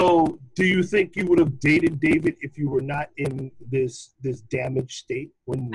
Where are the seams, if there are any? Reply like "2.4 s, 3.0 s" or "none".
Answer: none

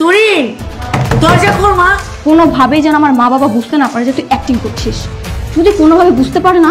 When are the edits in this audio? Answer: none

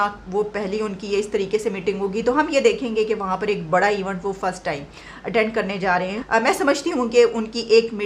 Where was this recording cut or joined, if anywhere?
6.2 s

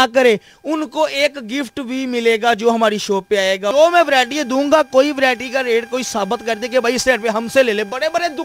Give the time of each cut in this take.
3.7 s

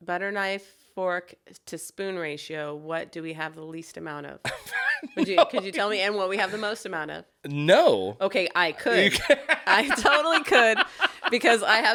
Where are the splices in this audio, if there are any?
none

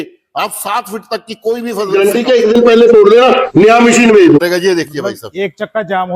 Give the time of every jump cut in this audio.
1.9 s, 4.4 s

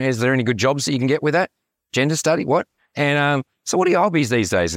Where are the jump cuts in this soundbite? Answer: 2.8 s

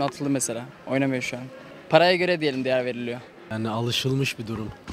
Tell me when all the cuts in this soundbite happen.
3.4 s

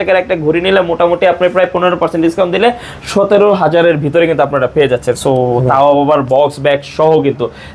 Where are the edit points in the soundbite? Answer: none

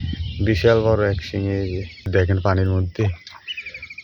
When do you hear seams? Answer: 2.1 s

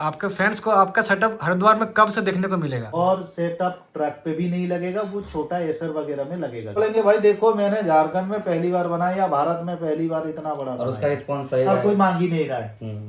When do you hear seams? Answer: 2.9 s, 6.8 s

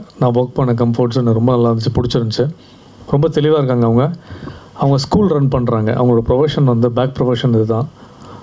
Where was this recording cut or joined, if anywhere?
none

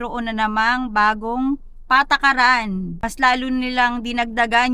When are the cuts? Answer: 2.9 s

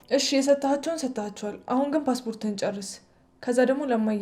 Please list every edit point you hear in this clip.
none

